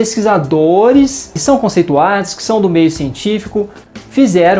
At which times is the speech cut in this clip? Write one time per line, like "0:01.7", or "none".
0:01.4